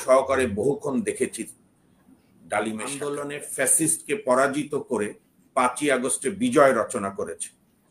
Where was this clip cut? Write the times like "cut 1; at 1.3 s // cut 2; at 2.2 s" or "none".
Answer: cut 1; at 3.2 s